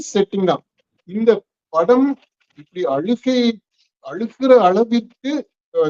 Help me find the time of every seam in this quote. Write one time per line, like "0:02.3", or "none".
0:01.0